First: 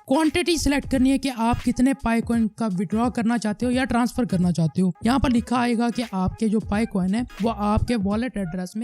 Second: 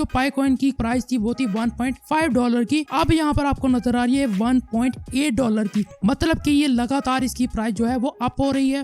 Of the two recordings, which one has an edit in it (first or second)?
first